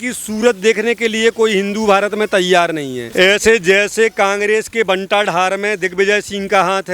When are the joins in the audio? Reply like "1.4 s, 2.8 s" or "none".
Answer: 3.0 s

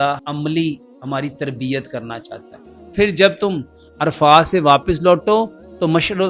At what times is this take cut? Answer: 2.9 s

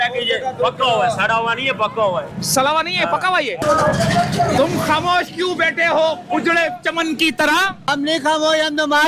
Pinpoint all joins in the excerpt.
3.6 s, 7.9 s

